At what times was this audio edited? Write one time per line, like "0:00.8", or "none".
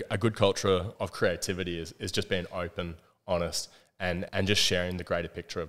0:00.9
0:04.3